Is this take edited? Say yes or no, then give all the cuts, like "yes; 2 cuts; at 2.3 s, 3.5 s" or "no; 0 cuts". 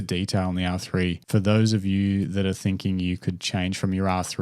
yes; 1 cut; at 1.2 s